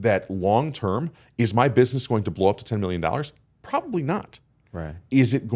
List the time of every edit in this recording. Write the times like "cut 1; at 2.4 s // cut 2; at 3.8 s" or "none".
none